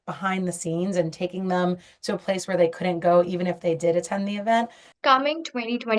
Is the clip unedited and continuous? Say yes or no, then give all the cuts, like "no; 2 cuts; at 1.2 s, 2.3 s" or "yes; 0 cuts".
no; 1 cut; at 4.8 s